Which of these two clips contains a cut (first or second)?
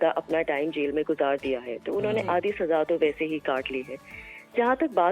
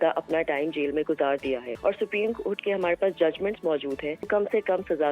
second